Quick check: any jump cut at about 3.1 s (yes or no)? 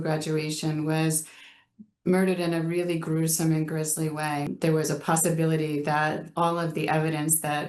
no